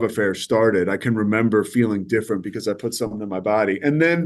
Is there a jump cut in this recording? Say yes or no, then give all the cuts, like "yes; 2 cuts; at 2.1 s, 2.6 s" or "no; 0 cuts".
no; 0 cuts